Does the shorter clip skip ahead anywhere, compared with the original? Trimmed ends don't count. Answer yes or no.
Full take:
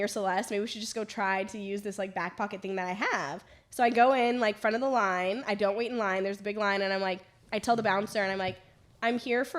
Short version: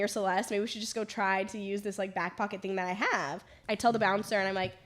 yes